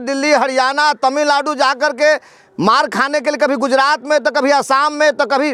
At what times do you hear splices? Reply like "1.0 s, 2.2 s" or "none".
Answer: none